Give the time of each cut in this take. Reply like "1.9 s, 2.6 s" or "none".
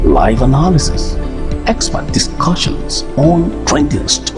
none